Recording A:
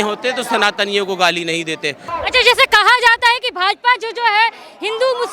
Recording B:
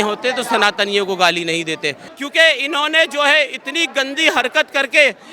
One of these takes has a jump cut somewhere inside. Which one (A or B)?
B